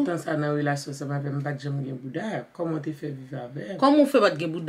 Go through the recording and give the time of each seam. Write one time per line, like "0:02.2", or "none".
none